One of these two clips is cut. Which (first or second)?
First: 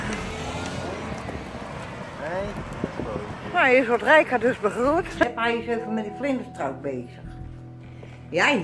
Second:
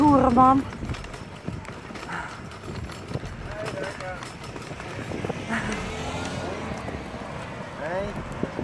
first